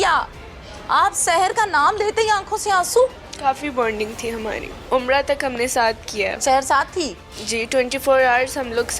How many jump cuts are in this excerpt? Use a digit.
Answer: 2